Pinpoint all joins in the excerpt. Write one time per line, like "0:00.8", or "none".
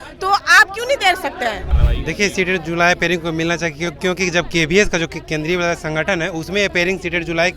0:01.7